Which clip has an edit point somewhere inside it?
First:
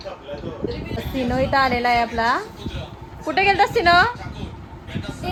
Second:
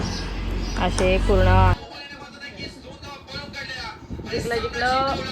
second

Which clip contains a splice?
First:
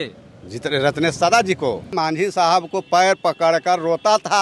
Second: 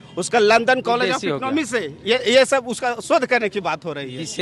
first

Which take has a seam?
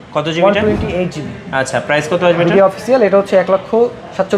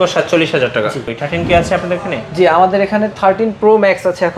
second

